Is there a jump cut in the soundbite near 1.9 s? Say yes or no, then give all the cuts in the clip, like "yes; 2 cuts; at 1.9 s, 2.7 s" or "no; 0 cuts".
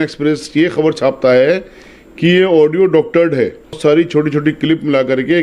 no; 1 cut; at 3.8 s